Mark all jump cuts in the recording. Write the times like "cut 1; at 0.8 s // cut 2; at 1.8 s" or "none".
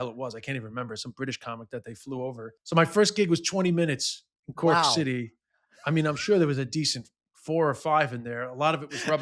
cut 1; at 2.6 s